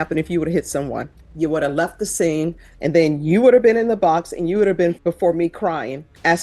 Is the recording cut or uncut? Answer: cut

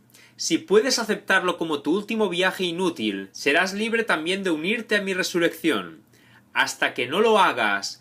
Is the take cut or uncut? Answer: uncut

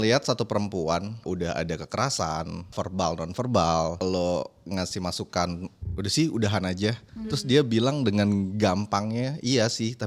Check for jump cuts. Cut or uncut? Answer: cut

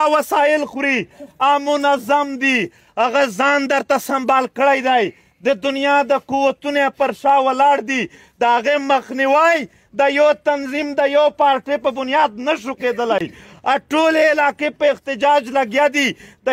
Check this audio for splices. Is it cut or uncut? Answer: uncut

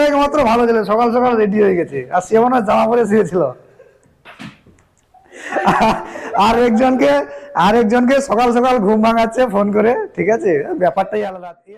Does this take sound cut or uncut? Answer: uncut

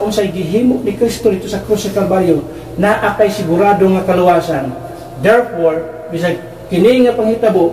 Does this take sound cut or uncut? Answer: uncut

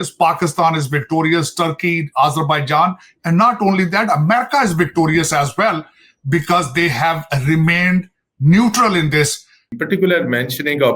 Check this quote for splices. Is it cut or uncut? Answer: cut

